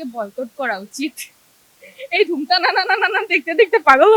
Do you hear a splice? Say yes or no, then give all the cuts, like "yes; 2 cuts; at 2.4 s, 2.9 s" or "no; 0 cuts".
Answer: no; 0 cuts